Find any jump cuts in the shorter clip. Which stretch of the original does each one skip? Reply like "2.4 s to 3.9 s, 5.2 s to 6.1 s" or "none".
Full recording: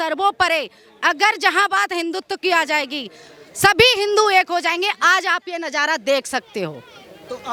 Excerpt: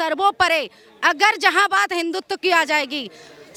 none